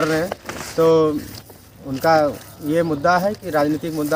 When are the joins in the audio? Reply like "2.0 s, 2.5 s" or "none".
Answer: none